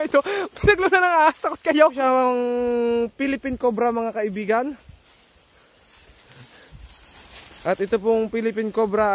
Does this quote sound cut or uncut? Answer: cut